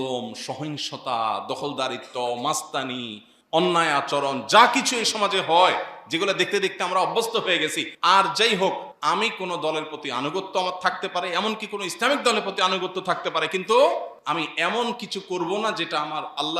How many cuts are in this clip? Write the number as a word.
three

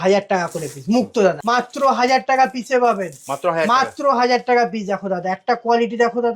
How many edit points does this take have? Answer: one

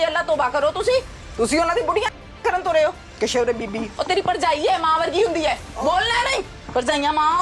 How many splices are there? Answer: two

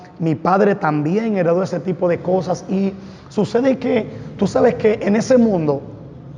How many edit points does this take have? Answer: zero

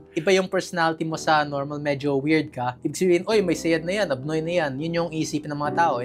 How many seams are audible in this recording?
zero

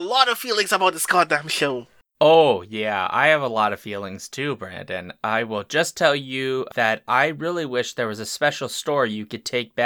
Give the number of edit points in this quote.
one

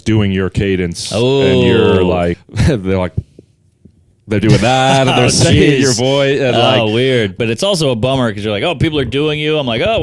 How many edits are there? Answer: two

